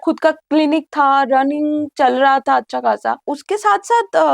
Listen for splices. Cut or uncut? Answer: cut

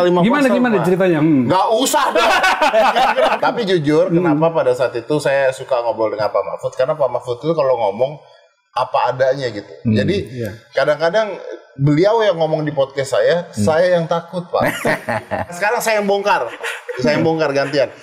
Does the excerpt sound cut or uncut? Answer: cut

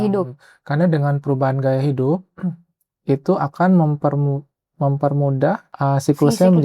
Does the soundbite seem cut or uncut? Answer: cut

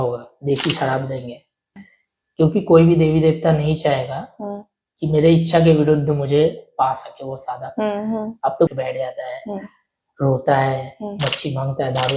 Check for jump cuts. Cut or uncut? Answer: cut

